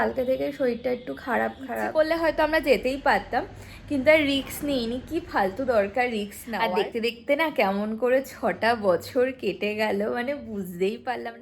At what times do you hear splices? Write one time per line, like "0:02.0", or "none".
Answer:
0:01.7
0:06.4